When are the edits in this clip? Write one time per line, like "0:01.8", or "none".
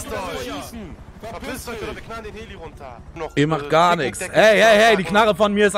0:03.1